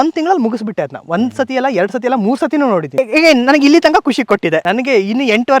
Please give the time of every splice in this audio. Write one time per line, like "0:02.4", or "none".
0:02.9
0:04.6